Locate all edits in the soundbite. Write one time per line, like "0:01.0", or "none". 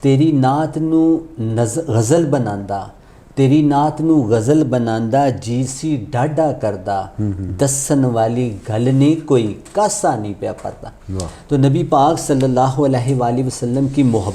none